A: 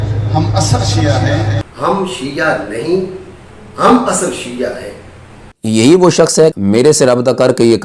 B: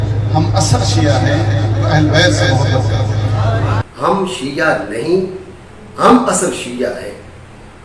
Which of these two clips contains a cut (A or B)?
A